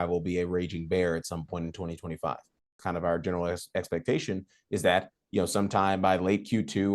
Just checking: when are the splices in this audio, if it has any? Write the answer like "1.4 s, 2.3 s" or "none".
2.8 s